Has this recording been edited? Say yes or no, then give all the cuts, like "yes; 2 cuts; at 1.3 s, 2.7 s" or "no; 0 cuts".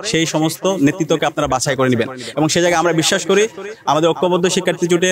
no; 0 cuts